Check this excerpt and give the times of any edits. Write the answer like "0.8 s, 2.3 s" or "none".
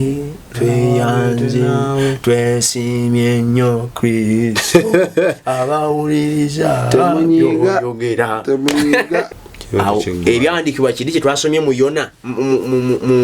9.3 s